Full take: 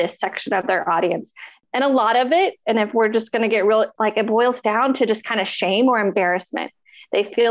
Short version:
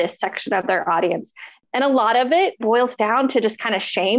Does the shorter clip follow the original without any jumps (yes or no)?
no